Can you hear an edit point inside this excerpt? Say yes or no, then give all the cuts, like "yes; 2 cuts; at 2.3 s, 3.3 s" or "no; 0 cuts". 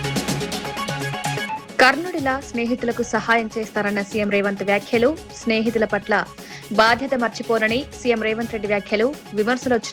yes; 1 cut; at 1.0 s